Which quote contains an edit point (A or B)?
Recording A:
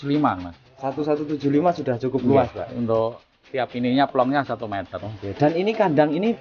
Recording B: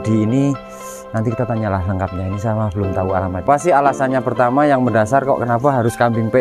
B